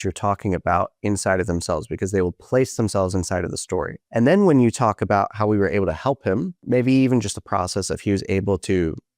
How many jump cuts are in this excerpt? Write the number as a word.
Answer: one